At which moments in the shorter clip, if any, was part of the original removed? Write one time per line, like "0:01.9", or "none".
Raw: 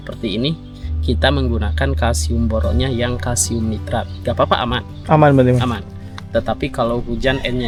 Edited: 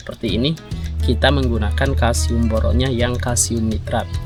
none